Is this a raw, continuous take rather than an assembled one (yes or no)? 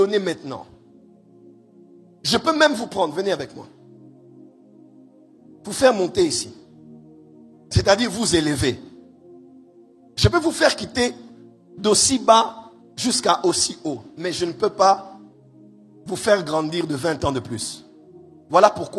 yes